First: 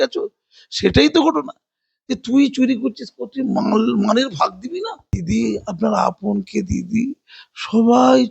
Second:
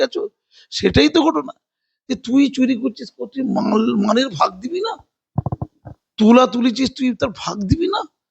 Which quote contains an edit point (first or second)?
first